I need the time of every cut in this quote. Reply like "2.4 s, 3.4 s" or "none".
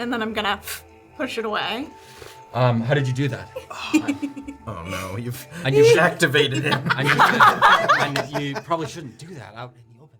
none